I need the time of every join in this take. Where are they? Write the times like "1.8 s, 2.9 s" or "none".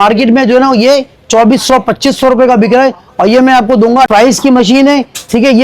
4.1 s